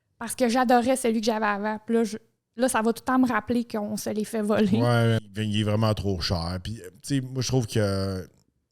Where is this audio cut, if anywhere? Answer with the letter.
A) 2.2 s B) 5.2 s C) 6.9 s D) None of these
B